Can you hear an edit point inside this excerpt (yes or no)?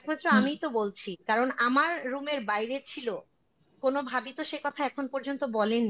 no